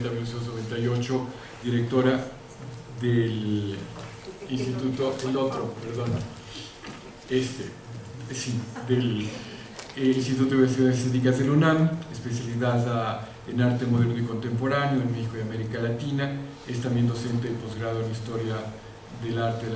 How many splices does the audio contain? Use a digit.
1